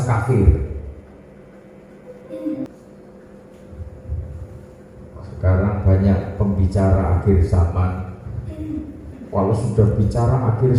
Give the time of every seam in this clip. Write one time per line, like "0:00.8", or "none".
0:02.7